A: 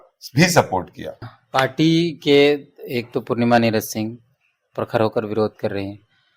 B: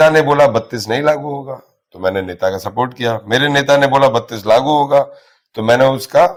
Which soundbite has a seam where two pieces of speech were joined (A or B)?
A